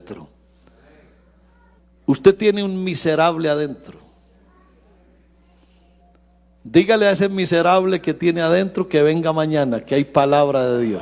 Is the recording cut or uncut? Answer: cut